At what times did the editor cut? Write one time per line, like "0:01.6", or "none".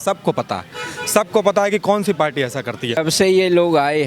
0:03.0